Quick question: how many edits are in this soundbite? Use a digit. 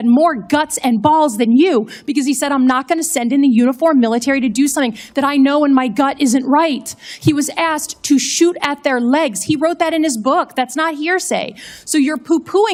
0